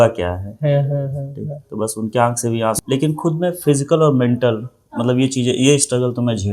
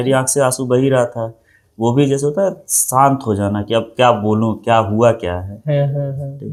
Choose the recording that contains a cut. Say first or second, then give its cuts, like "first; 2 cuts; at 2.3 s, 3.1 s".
first; 1 cut; at 2.8 s